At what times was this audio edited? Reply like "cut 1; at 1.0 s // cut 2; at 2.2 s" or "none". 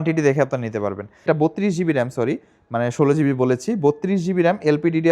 cut 1; at 1.2 s